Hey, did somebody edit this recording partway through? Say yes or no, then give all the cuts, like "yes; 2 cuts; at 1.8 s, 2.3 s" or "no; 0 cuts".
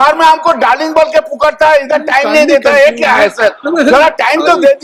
no; 0 cuts